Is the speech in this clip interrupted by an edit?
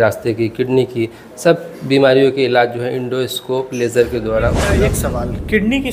yes; 1 cut; at 4.8 s

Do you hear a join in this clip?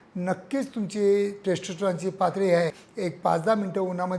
yes; 1 cut; at 2.9 s

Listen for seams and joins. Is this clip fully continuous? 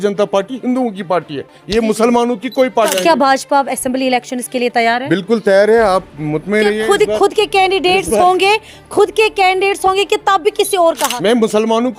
no; 2 cuts; at 2.9 s, 11.1 s

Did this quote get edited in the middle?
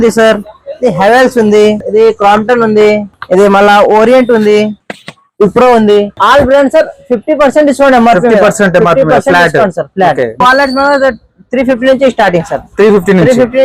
yes; 4 cuts; at 1.8 s, 3.1 s, 6.1 s, 10.4 s

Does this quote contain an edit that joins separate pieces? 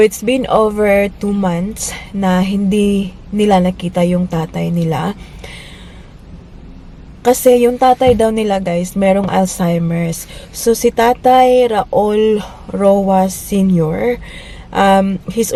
no; 0 cuts

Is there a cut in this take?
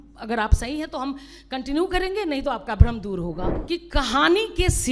yes; 1 cut; at 3.5 s

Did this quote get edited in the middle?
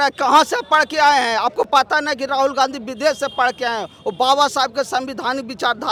no; 0 cuts

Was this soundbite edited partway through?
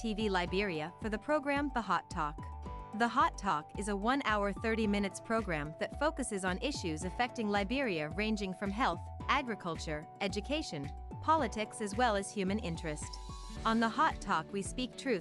no; 0 cuts

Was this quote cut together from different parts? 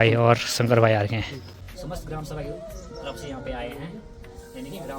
yes; 1 cut; at 1.4 s

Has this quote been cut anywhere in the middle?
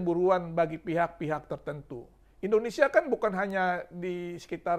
no; 0 cuts

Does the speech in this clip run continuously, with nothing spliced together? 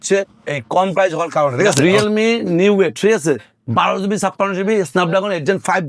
no; 1 cut; at 1.8 s

